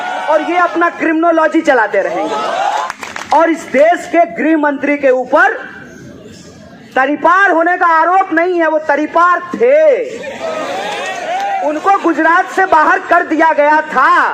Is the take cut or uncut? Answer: cut